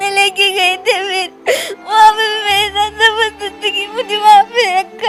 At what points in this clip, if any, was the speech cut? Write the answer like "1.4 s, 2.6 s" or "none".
none